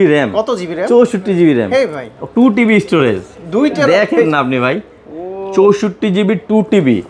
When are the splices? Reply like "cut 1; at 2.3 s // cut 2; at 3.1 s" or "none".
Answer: none